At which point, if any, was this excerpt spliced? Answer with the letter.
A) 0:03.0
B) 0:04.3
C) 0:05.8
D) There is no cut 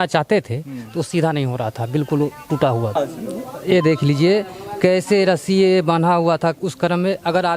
A